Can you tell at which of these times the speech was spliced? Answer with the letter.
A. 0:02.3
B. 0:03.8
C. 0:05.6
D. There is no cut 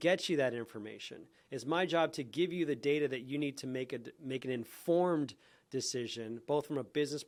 D